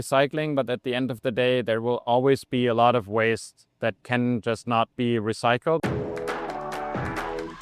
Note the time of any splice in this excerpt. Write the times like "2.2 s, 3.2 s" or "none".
5.8 s